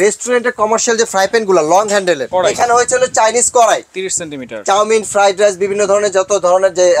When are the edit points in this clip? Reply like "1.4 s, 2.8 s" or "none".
2.2 s